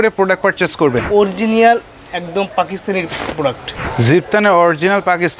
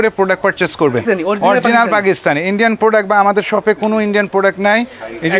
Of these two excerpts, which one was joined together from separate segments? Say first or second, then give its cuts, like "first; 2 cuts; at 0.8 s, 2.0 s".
first; 2 cuts; at 1.0 s, 3.8 s